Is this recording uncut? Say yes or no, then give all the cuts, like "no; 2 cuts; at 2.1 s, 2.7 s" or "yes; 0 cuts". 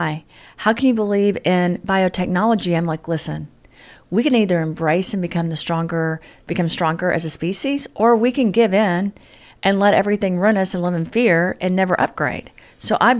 yes; 0 cuts